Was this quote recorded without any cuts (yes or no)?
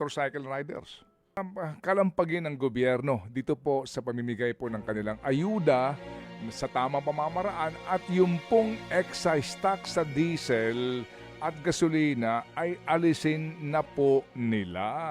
no